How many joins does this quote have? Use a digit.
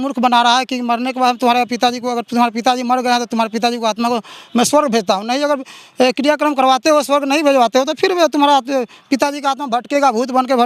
0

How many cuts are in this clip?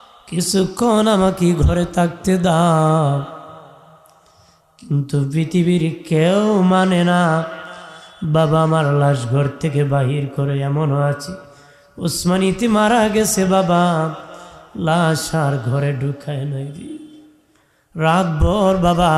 0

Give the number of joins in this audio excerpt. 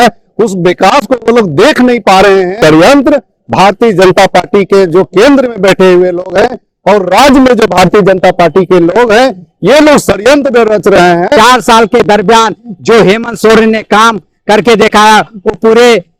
2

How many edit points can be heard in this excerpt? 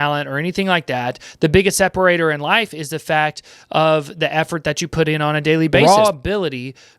1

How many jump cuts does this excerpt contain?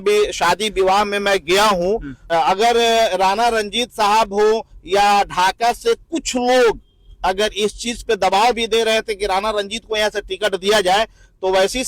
1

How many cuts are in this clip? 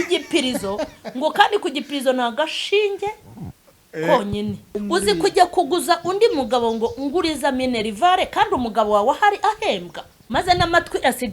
2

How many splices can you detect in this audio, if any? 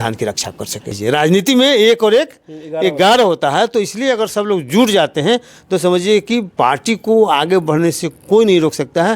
1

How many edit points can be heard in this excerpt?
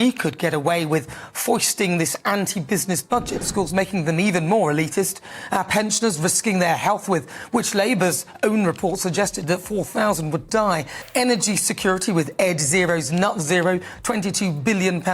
2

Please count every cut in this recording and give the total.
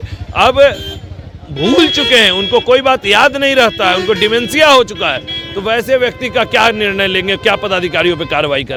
0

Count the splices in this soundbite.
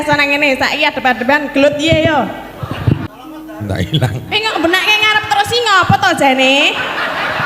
1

